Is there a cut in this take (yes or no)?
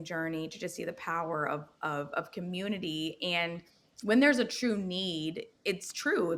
no